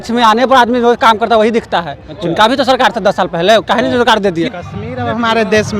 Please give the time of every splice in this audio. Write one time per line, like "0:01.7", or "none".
0:04.5